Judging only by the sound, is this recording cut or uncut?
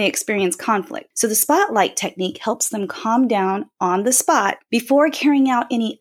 cut